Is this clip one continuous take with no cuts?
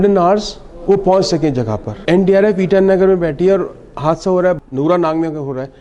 no; 2 cuts; at 1.9 s, 4.6 s

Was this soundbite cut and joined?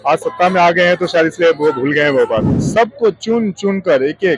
yes; 1 cut; at 2.6 s

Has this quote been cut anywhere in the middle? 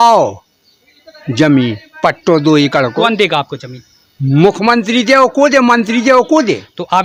no; 0 cuts

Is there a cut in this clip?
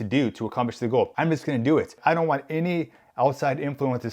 yes; 2 cuts; at 1.1 s, 1.9 s

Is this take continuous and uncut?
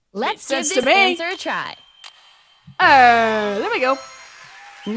no; 1 cut; at 1.3 s

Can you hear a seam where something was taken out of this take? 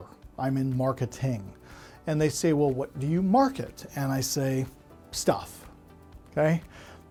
no; 0 cuts

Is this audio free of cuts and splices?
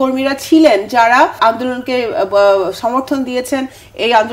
no; 1 cut; at 1.4 s

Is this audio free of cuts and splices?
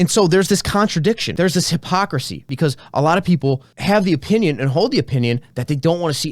no; 3 cuts; at 1.3 s, 2.4 s, 3.7 s

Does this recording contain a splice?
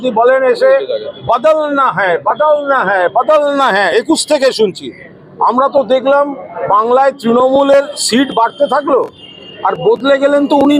no; 0 cuts

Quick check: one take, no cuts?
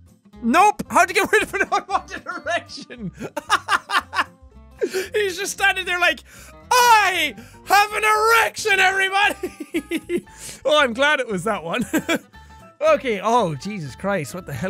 no; 1 cut; at 1.7 s

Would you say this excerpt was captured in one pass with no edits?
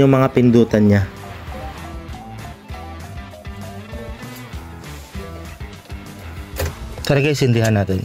yes; 0 cuts

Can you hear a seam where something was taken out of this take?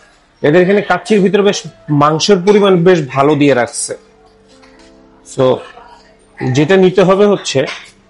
no; 0 cuts

